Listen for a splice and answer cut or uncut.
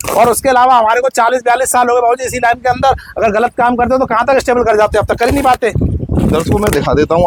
uncut